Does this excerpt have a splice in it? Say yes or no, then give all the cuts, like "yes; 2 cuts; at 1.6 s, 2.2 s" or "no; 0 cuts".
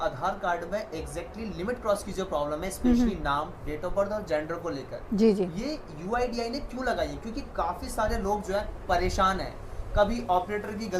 no; 0 cuts